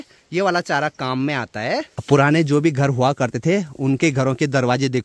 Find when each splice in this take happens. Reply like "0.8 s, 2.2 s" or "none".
none